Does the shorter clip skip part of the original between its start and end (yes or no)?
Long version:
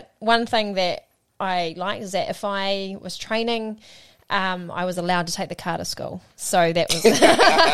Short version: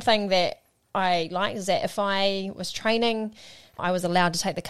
yes